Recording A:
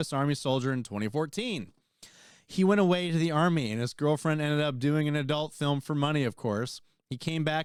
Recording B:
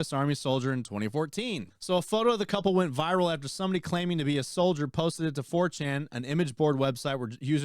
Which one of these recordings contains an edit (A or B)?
B